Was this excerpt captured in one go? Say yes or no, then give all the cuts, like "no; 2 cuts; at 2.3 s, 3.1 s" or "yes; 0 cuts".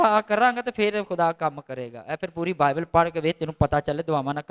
yes; 0 cuts